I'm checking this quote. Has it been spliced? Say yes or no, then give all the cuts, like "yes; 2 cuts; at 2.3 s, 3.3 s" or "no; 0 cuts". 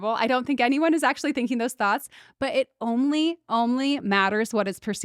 no; 0 cuts